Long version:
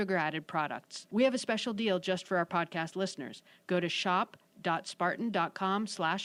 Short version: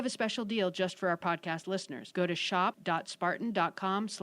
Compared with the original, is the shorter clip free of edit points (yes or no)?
no